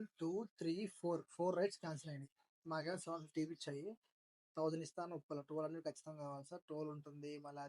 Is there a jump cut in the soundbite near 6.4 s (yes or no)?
no